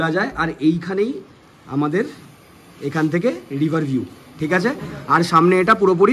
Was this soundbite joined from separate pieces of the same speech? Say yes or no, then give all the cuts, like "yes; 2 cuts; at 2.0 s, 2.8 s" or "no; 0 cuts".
no; 0 cuts